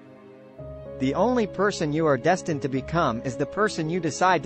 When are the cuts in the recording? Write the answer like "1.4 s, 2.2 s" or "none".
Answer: 1.0 s